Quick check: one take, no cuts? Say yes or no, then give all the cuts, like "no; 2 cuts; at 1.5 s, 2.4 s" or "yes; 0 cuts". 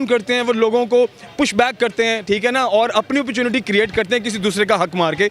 yes; 0 cuts